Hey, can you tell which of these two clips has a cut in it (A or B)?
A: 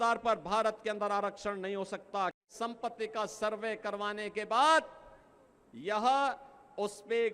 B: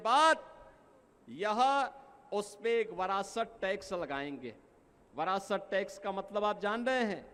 A